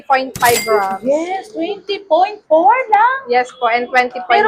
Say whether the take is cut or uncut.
uncut